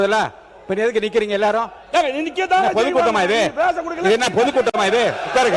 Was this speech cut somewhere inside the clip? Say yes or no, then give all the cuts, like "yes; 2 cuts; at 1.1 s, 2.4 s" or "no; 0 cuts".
no; 0 cuts